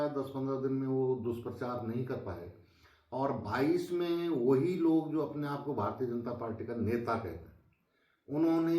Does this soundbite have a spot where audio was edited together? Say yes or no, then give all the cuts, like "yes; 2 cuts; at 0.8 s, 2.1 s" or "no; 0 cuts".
no; 0 cuts